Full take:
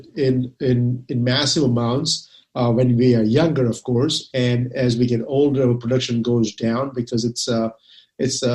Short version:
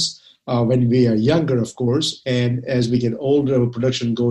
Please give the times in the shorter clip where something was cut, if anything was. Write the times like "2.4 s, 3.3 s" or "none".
none